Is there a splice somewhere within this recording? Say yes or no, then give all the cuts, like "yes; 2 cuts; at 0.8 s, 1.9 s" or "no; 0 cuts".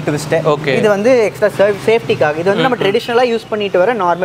no; 0 cuts